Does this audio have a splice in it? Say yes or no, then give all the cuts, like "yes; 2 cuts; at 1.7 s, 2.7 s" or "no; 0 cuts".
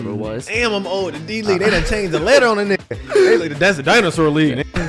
no; 0 cuts